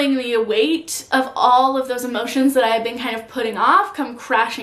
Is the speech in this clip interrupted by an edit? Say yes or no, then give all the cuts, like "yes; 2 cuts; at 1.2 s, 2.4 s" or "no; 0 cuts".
no; 0 cuts